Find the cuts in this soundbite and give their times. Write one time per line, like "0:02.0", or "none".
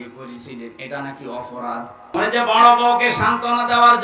0:02.1